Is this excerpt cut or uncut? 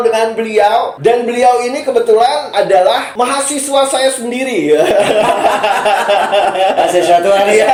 uncut